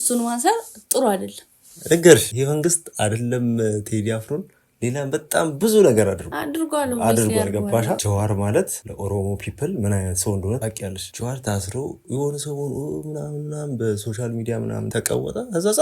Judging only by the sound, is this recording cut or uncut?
cut